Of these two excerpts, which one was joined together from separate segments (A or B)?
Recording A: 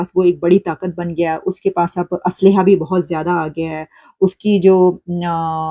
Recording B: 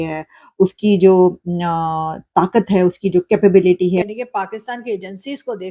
B